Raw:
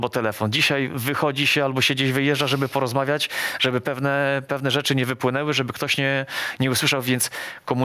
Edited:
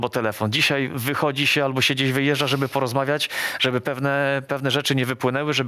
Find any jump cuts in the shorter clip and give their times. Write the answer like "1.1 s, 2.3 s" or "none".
none